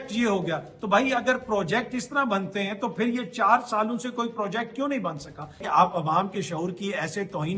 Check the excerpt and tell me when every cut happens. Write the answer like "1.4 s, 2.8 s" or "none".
5.6 s